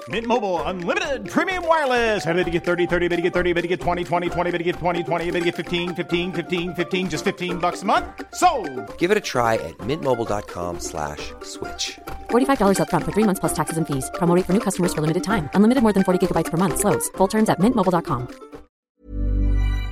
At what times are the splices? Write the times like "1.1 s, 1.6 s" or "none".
18.9 s